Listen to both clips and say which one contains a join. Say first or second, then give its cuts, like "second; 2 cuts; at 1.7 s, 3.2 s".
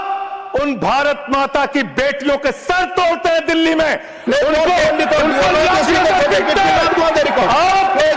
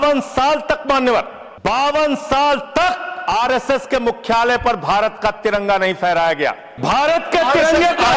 second; 3 cuts; at 1.4 s, 3.1 s, 6.7 s